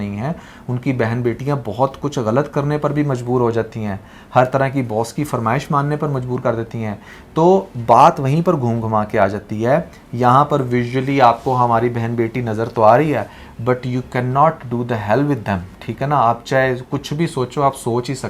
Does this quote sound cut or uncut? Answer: uncut